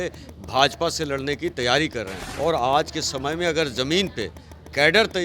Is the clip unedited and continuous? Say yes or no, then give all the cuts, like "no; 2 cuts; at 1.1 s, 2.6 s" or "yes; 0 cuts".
no; 1 cut; at 2.2 s